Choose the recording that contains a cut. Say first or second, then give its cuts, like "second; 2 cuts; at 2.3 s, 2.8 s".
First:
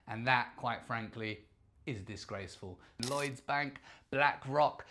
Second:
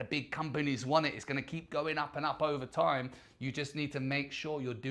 first; 1 cut; at 3.0 s